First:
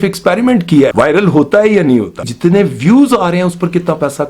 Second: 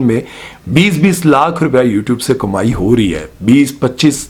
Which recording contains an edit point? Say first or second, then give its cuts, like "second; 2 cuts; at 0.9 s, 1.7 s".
first; 2 cuts; at 0.9 s, 2.2 s